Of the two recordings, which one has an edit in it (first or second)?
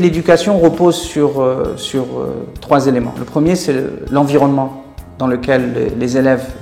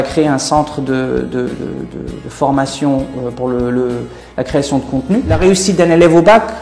second